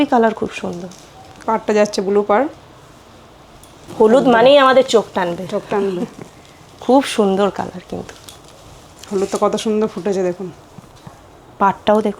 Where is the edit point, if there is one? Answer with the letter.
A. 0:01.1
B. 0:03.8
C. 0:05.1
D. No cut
B